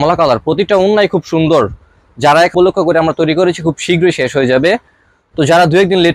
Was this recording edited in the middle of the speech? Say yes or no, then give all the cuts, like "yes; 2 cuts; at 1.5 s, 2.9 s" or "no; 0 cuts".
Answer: yes; 1 cut; at 2.5 s